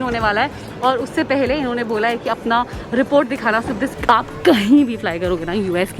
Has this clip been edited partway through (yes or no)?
yes